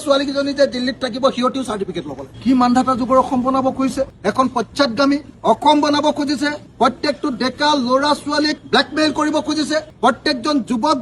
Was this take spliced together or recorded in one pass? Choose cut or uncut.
cut